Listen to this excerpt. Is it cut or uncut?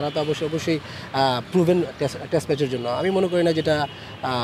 uncut